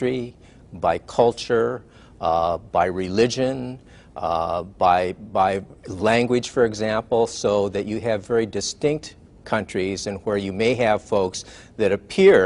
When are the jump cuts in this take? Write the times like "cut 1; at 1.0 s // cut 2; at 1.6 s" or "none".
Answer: cut 1; at 4.7 s